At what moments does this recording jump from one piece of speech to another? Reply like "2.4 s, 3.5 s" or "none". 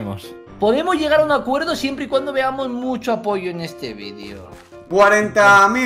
4.9 s